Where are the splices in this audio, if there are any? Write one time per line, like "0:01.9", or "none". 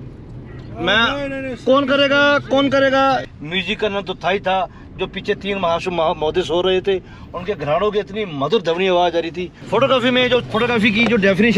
0:03.2
0:09.5